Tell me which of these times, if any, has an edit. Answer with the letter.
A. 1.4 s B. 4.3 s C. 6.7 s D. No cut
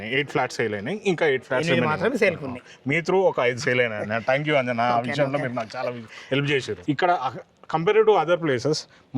C